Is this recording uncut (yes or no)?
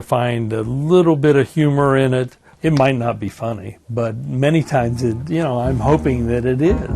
no